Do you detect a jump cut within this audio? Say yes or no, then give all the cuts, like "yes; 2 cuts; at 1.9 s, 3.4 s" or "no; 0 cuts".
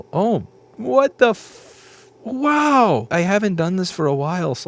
yes; 1 cut; at 3.1 s